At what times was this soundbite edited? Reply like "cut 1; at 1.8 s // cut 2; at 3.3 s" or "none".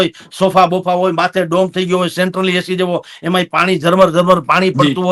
none